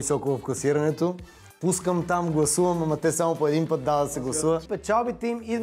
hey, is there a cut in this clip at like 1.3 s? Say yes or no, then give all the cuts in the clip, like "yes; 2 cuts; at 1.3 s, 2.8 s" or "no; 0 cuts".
no; 1 cut; at 4.6 s